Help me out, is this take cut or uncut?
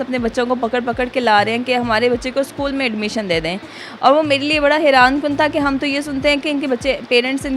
uncut